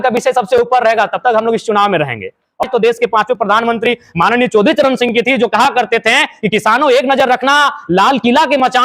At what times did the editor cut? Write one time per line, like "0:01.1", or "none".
0:02.6

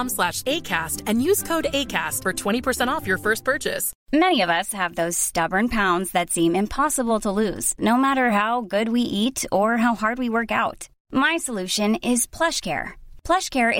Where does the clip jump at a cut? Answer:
0:03.9

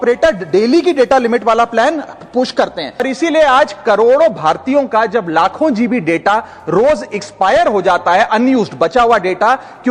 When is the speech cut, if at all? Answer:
0:03.0

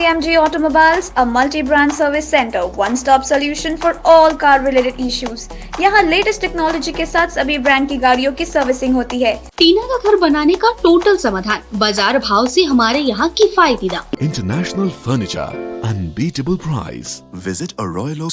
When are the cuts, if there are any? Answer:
0:09.5
0:14.2

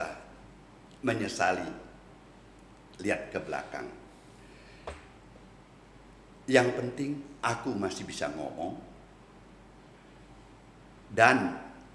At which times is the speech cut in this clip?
none

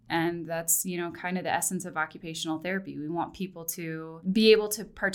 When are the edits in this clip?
0:04.1

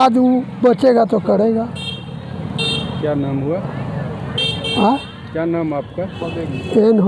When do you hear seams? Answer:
none

